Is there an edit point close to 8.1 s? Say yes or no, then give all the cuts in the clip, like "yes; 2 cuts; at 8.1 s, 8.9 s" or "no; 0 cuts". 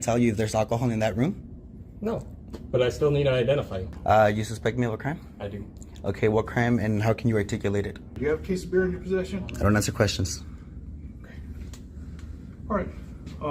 yes; 2 cuts; at 3.9 s, 8.1 s